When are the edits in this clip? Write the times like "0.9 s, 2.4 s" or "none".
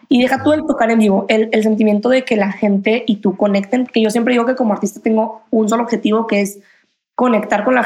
none